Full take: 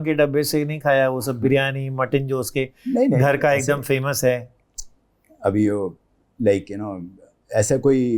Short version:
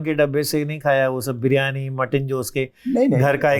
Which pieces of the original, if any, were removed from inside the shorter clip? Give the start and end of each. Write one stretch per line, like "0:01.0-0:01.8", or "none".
none